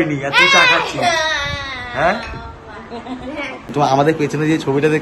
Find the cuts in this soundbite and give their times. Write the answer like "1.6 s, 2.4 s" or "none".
3.7 s